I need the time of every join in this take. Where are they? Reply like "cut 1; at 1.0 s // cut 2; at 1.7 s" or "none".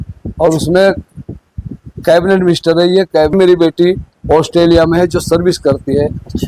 cut 1; at 3.3 s